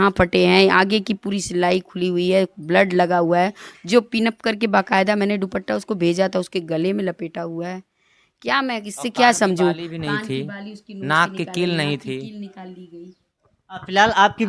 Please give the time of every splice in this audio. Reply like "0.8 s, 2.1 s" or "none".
none